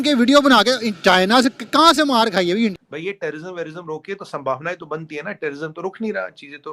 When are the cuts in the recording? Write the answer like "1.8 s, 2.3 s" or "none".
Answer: 2.8 s